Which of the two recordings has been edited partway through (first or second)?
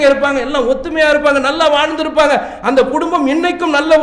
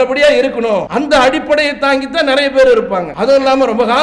second